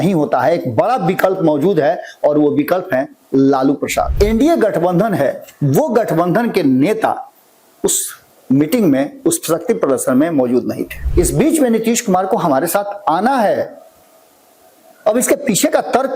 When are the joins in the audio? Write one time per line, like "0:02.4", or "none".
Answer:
0:04.1
0:10.9